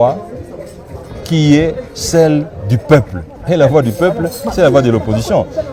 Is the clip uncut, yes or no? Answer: yes